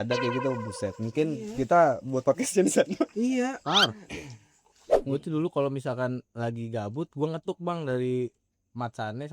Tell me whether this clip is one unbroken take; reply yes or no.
no